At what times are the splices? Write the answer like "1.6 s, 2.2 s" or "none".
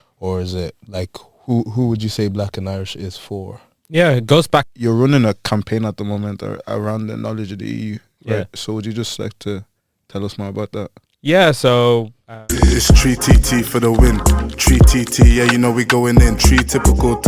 4.7 s, 12.3 s